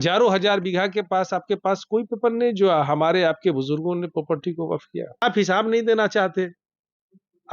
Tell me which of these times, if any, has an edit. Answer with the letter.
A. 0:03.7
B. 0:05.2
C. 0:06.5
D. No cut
B